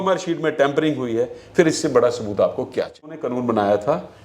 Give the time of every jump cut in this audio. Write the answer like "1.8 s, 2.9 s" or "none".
3.2 s